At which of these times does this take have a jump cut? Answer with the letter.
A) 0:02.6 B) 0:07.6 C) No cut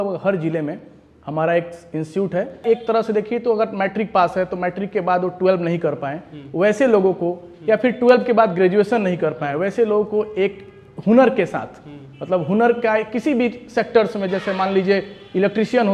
A